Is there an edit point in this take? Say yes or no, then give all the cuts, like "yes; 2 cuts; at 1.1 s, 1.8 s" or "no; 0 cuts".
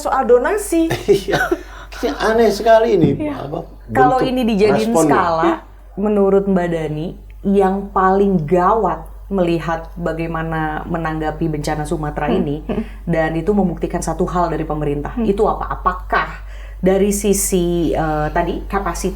no; 0 cuts